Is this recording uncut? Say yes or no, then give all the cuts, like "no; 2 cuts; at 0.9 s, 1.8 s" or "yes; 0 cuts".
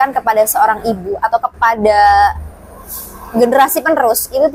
yes; 0 cuts